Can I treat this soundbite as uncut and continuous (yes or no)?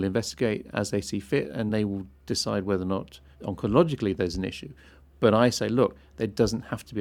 no